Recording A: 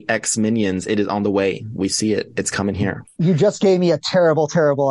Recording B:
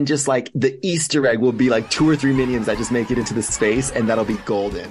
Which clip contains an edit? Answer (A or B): A